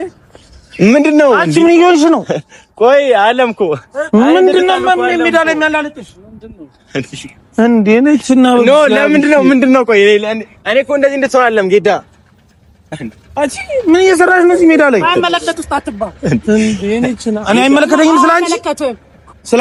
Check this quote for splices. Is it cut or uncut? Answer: uncut